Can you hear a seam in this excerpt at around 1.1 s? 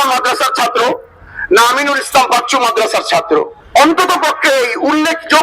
no; 1 cut; at 3.6 s

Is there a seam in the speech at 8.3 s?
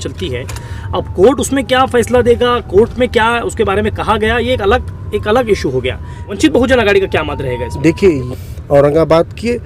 yes; 2 cuts; at 6.3 s, 8.3 s

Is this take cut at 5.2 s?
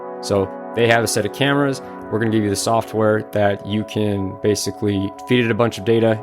yes; 1 cut; at 5.2 s

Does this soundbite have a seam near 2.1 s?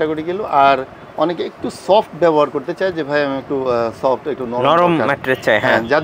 no; 0 cuts

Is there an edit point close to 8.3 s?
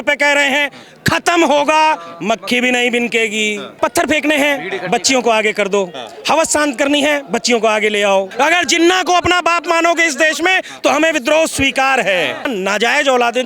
yes; 3 cuts; at 3.7 s, 8.3 s, 12.5 s

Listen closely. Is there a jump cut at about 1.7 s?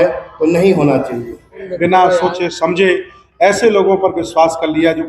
yes; 1 cut; at 1.7 s

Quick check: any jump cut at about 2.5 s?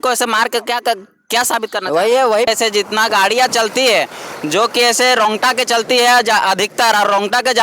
yes; 1 cut; at 2.5 s

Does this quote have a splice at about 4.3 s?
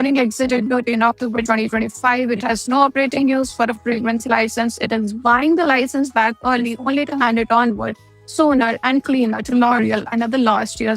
yes; 1 cut; at 4.3 s

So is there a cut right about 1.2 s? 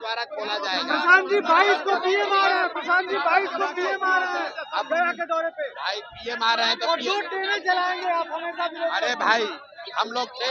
no; 0 cuts

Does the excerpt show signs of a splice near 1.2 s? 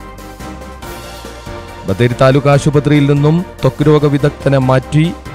yes; 1 cut; at 1.2 s

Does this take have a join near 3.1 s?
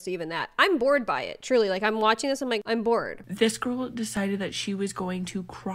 yes; 1 cut; at 3.1 s

